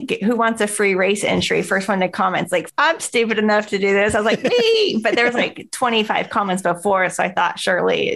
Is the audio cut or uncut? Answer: cut